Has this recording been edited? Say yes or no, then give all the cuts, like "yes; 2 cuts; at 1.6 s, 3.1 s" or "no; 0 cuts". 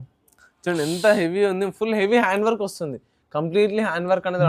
no; 0 cuts